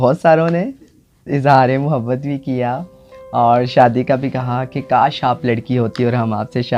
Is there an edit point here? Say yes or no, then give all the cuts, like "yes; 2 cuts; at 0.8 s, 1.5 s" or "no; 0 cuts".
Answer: no; 0 cuts